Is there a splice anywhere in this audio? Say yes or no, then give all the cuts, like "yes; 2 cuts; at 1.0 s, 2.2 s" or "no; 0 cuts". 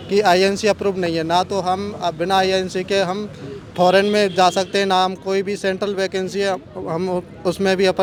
no; 0 cuts